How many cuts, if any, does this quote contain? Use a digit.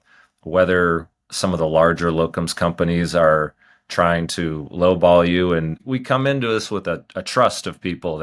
1